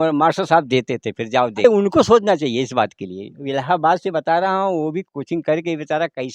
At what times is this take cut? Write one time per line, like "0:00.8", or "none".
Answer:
0:01.6